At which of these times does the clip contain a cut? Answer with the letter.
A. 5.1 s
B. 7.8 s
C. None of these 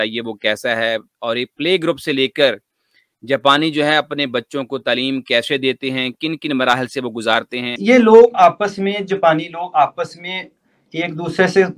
B